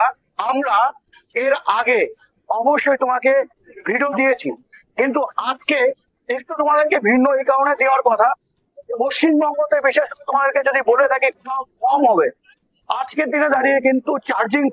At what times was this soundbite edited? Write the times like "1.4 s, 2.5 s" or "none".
none

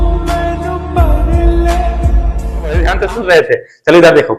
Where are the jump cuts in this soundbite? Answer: 2.8 s

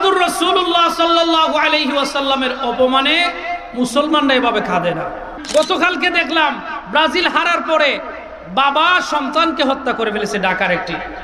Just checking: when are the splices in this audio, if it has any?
5.4 s

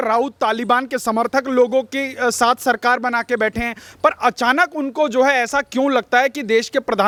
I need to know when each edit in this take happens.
none

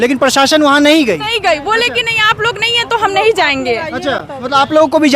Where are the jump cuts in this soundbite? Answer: none

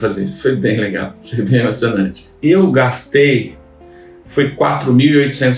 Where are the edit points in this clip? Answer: 2.2 s

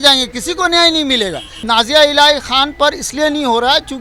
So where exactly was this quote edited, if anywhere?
1.5 s

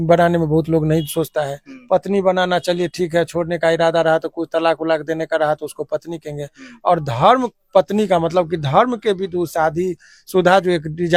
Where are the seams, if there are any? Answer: none

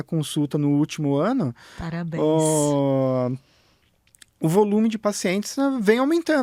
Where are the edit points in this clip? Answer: none

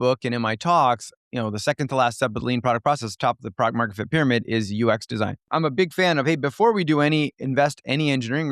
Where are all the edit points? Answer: 1.2 s, 5.5 s

